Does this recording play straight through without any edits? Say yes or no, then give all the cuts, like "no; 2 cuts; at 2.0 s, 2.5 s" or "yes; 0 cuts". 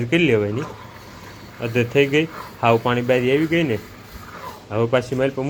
yes; 0 cuts